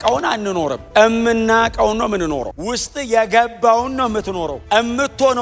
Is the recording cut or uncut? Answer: cut